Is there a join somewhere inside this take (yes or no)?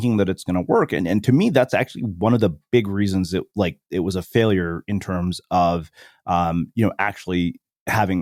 no